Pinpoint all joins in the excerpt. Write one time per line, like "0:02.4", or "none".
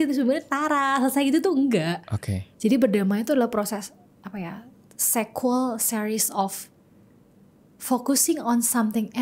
none